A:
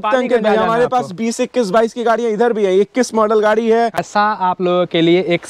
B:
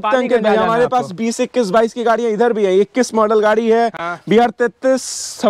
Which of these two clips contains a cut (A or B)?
A